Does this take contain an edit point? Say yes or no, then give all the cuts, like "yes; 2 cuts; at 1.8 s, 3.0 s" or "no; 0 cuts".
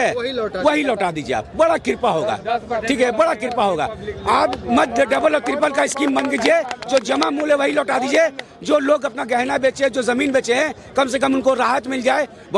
no; 0 cuts